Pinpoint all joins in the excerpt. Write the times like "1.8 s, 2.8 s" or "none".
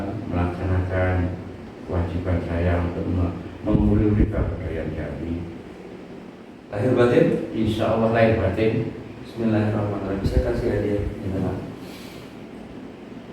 6.5 s